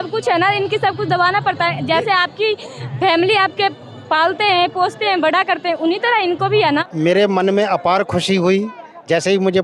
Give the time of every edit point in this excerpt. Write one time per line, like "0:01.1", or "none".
0:06.6